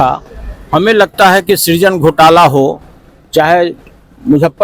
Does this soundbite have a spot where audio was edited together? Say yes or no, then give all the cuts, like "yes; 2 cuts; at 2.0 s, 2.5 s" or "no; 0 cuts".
no; 0 cuts